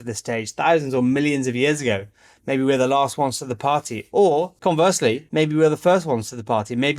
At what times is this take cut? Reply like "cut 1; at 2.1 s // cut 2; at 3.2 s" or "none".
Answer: cut 1; at 4.9 s